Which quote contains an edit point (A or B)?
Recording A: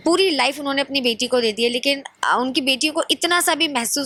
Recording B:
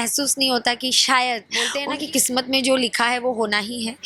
B